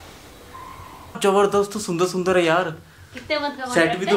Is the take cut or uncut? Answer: cut